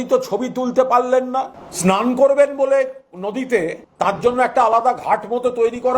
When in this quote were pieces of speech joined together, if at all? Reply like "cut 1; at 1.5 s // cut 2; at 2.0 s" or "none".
cut 1; at 1.6 s // cut 2; at 3.8 s